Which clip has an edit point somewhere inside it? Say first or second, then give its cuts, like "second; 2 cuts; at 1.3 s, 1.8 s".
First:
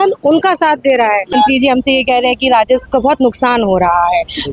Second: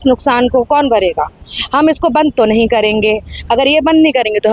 first; 1 cut; at 1.3 s